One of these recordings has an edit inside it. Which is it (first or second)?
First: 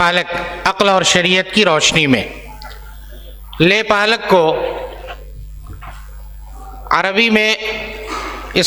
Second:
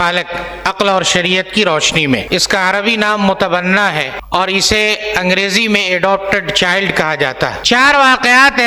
second